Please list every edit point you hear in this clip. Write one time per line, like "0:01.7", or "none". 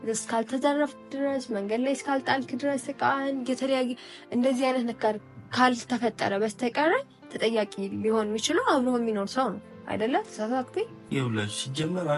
0:11.1